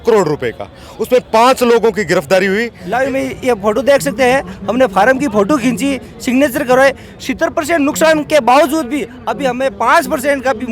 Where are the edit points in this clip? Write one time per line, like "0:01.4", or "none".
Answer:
0:02.8